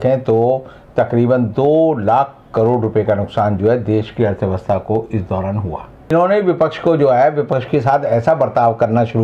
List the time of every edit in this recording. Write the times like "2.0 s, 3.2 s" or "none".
6.1 s